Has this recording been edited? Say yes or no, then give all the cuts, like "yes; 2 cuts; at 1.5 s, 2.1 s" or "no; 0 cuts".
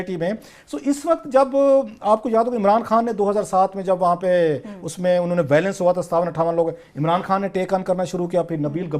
yes; 1 cut; at 4.0 s